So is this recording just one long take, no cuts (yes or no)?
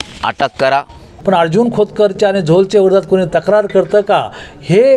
no